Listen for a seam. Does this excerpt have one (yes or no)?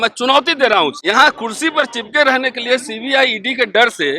yes